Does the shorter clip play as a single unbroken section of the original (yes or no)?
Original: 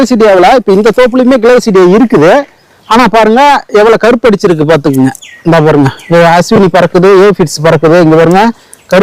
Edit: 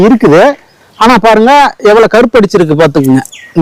yes